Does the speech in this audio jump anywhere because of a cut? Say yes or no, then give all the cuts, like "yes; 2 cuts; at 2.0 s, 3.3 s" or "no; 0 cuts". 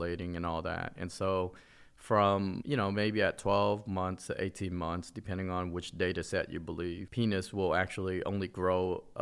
yes; 1 cut; at 7.1 s